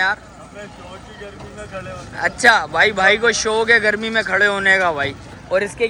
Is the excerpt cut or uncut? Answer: uncut